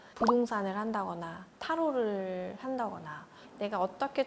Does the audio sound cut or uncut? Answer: uncut